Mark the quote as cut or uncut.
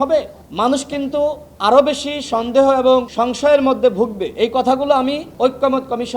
cut